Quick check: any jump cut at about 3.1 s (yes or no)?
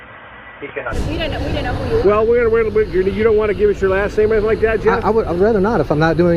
no